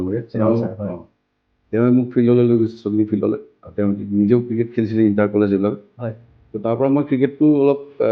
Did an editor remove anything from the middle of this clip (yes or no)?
yes